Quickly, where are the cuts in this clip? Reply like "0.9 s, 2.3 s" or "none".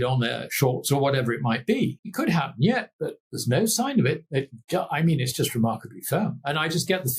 2.0 s